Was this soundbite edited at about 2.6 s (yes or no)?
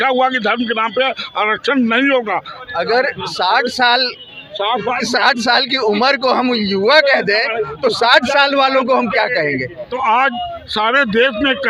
yes